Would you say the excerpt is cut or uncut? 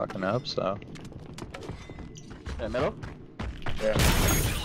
uncut